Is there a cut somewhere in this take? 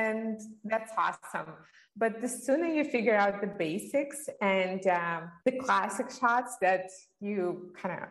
yes; 1 cut; at 5.3 s

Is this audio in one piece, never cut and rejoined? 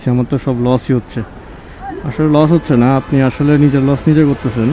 yes; 0 cuts

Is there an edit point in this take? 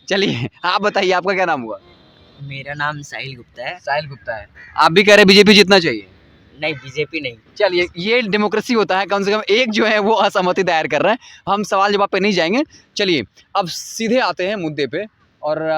no; 0 cuts

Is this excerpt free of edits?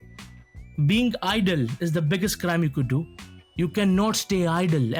yes; 0 cuts

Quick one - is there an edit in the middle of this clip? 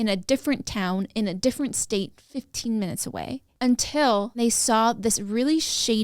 yes; 1 cut; at 4.4 s

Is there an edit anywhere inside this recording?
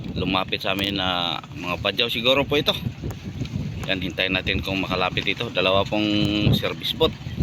no; 0 cuts

